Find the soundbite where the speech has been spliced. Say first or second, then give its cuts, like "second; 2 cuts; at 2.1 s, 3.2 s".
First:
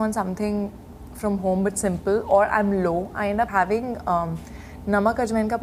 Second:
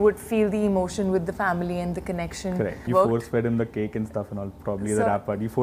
second; 1 cut; at 2.9 s